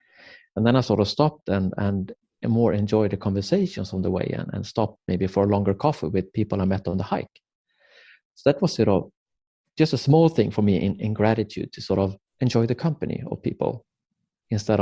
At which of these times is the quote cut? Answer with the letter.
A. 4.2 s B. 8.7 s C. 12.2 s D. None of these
C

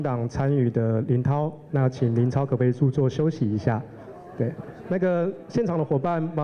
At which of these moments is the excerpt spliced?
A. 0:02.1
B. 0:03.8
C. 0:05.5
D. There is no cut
D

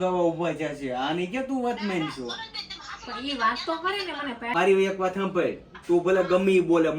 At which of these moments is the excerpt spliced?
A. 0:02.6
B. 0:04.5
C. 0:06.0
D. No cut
B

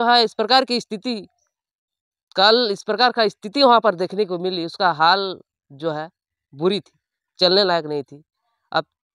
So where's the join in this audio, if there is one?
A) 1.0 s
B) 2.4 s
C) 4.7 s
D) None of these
D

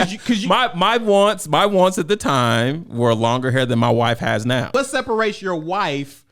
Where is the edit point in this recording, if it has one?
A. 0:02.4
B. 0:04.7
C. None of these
B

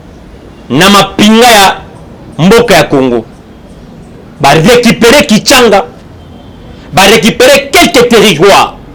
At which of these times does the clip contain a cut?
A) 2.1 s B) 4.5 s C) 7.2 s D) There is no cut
D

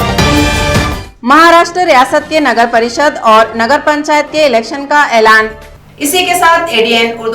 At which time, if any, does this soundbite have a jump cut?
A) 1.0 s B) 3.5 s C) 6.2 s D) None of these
D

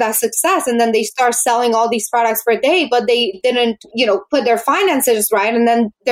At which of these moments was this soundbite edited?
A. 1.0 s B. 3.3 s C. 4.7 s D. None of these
B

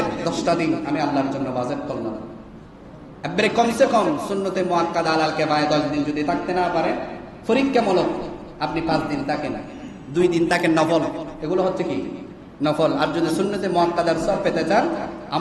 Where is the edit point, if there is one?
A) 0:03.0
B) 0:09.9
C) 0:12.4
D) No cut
D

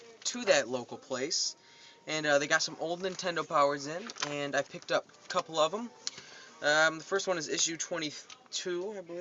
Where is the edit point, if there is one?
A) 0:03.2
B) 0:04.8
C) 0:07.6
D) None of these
A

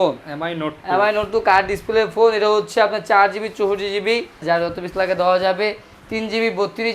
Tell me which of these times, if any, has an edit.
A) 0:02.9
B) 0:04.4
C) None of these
B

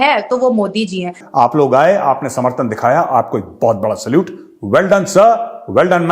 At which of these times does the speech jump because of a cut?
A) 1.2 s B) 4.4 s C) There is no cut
A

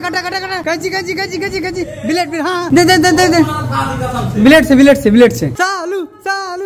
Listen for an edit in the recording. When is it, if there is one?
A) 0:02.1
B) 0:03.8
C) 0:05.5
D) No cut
C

